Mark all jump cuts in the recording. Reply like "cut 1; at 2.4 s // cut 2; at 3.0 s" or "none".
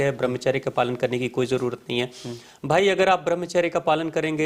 none